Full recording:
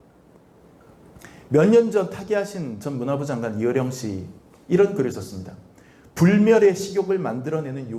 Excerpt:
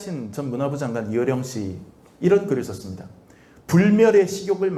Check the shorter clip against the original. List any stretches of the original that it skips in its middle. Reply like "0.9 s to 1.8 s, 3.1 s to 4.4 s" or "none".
none

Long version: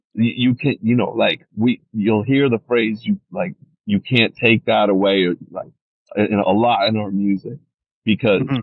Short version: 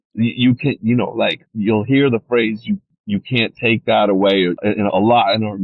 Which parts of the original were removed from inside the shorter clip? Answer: 1.5 s to 1.9 s, 3.3 s to 3.7 s, 5.4 s to 6.1 s

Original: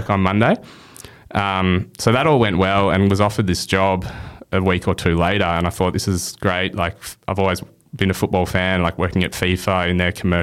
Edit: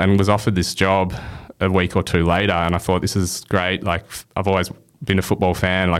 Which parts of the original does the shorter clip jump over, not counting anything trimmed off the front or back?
none

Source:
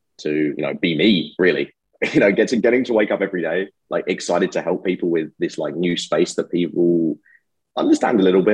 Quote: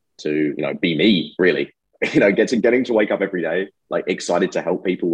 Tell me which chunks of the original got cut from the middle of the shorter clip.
none

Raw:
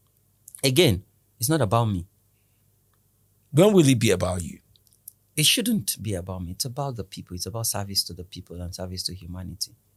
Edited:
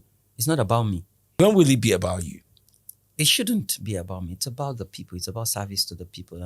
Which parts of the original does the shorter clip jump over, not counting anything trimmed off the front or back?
2.2 s to 3.3 s

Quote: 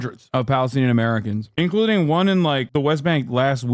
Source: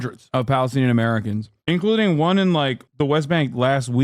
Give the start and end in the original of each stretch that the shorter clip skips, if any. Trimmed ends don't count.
1.4 s to 1.5 s, 2.8 s to 2.9 s

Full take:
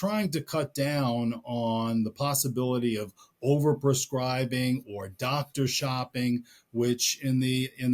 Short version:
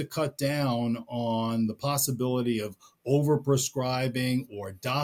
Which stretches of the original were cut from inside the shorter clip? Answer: none

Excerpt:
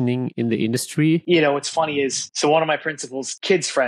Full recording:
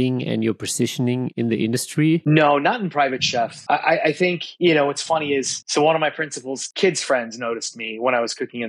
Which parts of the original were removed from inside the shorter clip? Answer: 2.2 s to 4.6 s

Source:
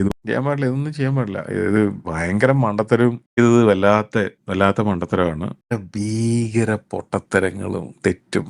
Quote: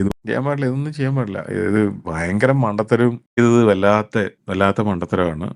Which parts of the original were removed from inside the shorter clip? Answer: none

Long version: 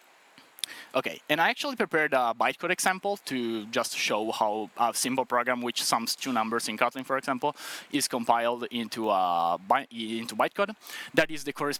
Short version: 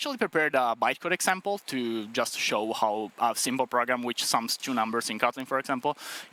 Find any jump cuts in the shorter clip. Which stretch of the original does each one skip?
none

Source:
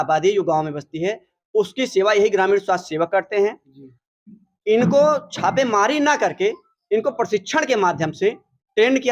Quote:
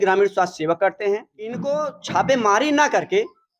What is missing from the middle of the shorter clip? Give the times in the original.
3.9 s to 4.9 s

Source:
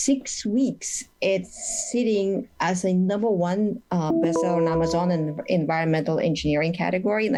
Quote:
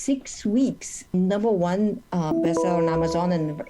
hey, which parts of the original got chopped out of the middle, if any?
1.1 s to 2.9 s

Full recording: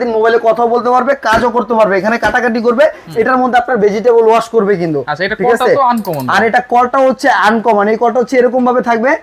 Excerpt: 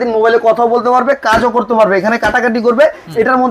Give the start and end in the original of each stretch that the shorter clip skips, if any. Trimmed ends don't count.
none

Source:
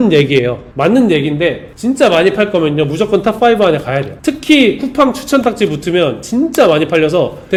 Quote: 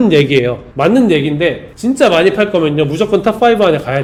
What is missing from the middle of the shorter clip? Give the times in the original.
none

